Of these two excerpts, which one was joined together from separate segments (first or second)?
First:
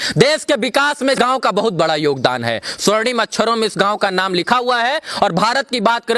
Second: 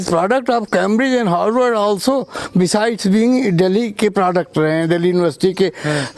first